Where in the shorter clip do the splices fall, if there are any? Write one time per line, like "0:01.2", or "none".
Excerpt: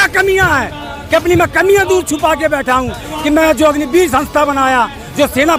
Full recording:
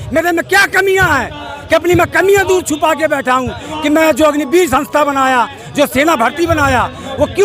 none